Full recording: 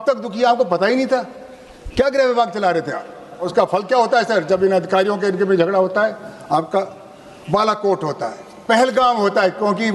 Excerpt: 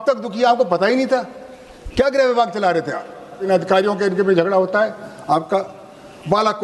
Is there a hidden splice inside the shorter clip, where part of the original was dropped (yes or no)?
yes